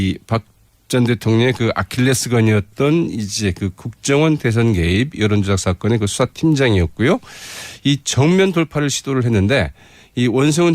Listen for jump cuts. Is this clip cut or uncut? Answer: uncut